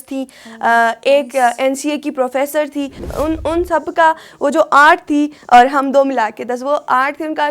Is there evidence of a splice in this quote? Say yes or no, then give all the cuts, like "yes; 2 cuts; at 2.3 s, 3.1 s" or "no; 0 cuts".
yes; 1 cut; at 3.0 s